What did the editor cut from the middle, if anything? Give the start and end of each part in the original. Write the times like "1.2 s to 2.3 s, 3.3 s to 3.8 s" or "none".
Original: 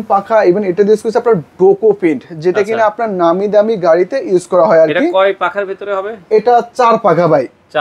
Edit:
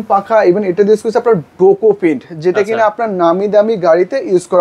none